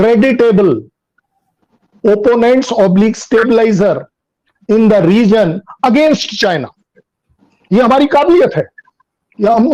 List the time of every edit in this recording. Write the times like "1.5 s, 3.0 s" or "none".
none